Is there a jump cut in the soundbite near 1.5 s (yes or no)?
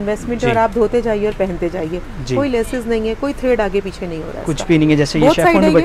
no